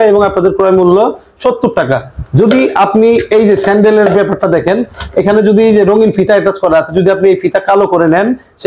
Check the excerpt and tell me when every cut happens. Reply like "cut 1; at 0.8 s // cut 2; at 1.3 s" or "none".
none